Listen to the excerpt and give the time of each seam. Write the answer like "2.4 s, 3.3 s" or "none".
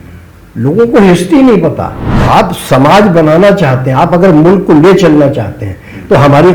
2.1 s